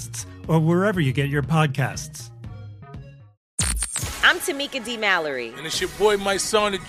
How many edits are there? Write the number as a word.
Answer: one